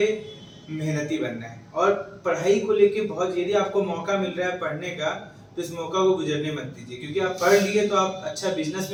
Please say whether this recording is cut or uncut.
uncut